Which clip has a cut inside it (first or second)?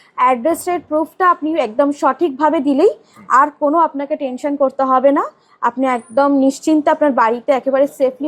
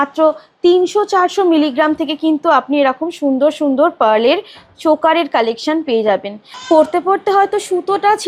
second